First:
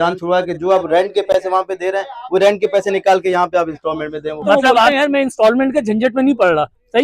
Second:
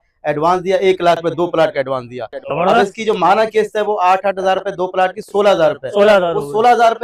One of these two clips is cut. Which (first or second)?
first